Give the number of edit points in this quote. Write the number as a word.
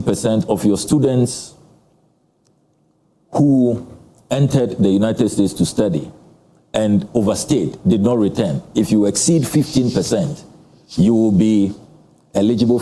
zero